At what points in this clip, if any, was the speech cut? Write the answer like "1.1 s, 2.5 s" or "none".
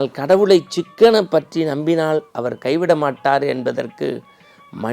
none